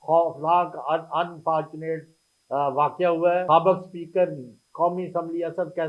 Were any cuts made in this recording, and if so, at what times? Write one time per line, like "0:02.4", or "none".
0:03.4